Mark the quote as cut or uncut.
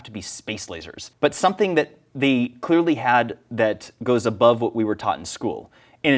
cut